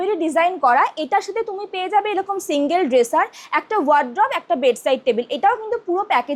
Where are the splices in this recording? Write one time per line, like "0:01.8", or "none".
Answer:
none